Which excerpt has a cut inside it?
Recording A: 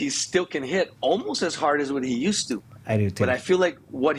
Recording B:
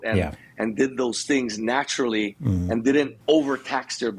B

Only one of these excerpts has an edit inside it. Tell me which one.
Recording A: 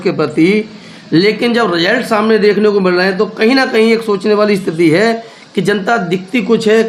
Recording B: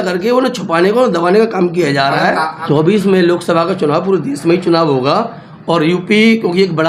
B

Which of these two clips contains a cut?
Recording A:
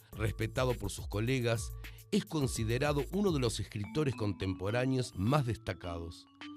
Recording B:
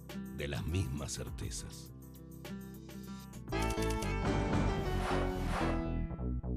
A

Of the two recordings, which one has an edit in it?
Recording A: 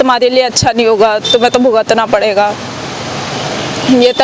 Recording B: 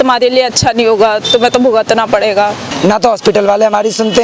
B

